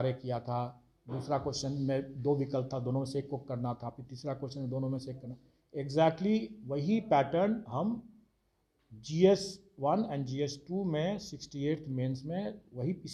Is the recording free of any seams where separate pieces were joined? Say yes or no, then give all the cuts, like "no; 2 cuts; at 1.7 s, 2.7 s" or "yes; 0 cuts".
yes; 0 cuts